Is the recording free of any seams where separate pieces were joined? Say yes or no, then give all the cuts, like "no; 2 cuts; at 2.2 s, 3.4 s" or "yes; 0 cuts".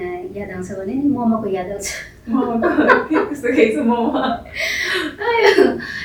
yes; 0 cuts